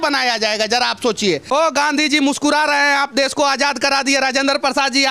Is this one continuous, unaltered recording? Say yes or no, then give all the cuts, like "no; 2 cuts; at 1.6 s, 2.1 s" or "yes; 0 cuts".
no; 1 cut; at 1.4 s